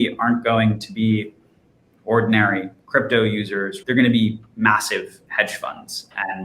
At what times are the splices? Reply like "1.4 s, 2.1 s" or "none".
3.7 s